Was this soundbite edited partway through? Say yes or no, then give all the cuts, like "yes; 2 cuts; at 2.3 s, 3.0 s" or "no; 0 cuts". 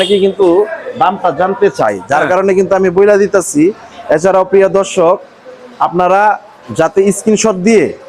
no; 0 cuts